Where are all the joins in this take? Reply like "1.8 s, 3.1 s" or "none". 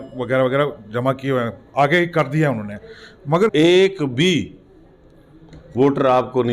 3.5 s

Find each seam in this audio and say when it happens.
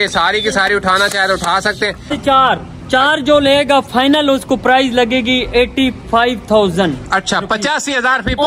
2.1 s

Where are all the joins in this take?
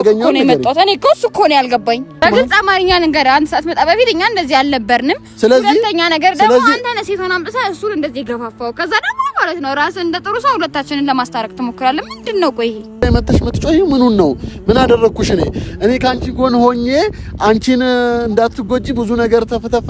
2.2 s, 13.0 s

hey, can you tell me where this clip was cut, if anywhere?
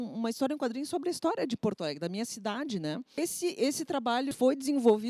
3.2 s, 4.3 s

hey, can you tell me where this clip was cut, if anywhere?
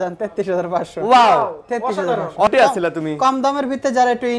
2.5 s

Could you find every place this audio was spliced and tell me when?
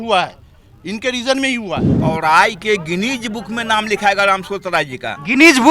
1.9 s

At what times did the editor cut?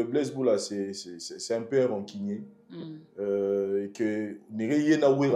none

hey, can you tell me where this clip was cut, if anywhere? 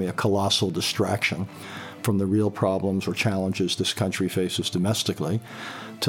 none

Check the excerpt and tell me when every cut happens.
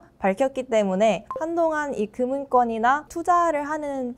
1.3 s, 3.1 s

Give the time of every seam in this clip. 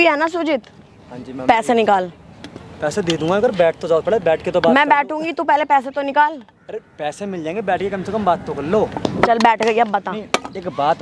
none

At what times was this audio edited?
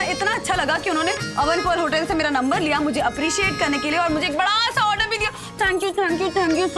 none

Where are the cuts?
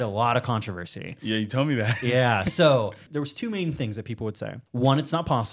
3.0 s, 4.6 s

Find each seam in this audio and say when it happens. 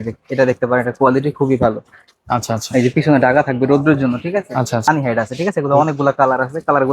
4.9 s

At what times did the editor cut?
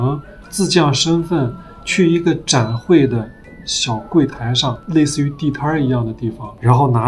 none

